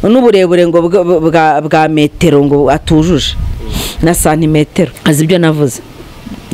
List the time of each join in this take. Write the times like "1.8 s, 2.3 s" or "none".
5.0 s